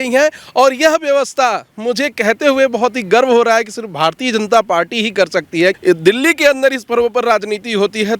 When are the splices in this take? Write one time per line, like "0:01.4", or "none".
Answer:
0:05.8